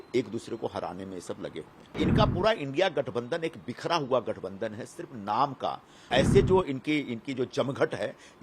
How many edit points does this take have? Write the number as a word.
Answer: two